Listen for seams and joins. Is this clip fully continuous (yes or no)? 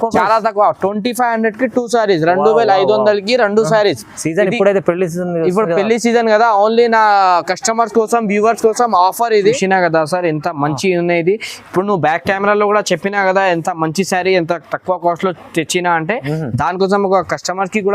no